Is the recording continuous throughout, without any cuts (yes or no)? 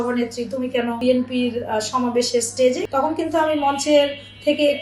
no